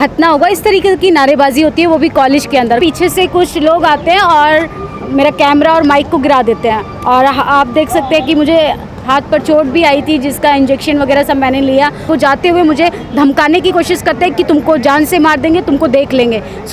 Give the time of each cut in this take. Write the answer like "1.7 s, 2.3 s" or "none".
2.8 s, 12.1 s

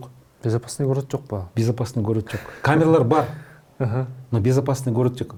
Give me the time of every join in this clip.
none

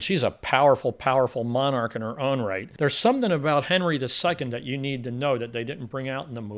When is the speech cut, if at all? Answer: 2.6 s

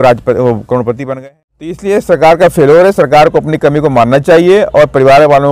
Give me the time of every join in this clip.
1.1 s

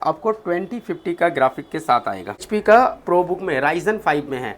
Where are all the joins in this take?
2.5 s

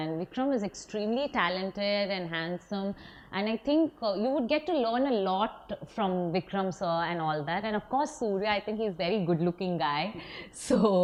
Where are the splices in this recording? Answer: none

